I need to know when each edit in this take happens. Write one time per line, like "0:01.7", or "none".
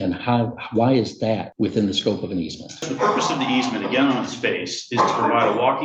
0:01.5
0:02.9